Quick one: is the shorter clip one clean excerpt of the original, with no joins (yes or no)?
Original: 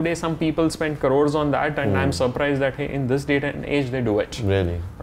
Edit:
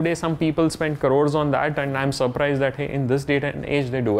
yes